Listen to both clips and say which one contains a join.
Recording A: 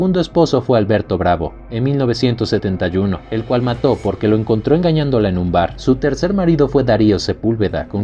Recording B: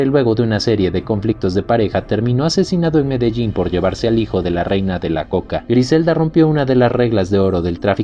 B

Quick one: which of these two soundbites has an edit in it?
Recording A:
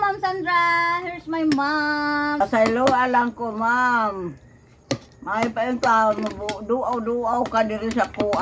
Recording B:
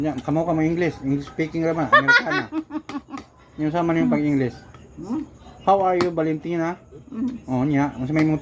A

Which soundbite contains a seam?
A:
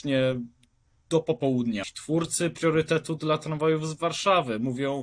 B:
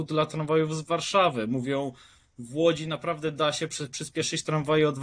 A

